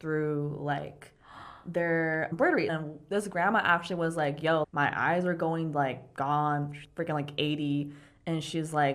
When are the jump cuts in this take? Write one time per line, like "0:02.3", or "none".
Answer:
0:02.7

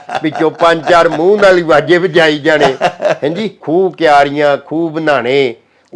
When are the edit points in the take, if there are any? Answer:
0:03.6

